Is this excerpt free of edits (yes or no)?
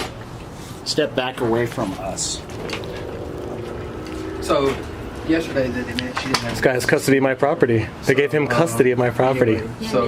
yes